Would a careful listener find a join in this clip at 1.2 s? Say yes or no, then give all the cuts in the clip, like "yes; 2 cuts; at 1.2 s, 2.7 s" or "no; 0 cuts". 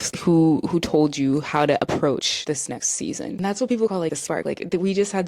no; 1 cut; at 3.3 s